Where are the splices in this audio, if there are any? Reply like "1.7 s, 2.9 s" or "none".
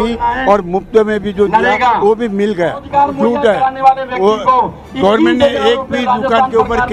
2.8 s